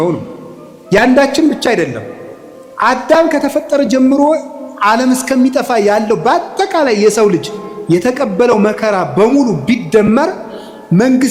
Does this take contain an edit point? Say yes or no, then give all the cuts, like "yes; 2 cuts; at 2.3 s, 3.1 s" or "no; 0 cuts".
no; 0 cuts